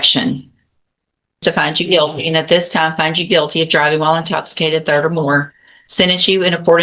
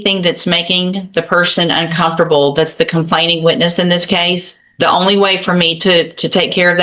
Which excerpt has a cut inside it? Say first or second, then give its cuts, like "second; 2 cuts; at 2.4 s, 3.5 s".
first; 1 cut; at 1.4 s